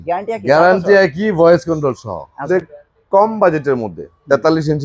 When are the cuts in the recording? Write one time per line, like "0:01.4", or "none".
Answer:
0:02.4